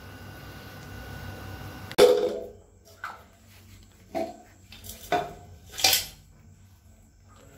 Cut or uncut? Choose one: cut